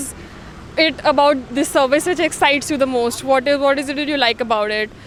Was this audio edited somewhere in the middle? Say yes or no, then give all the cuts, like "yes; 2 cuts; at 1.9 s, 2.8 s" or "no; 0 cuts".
no; 0 cuts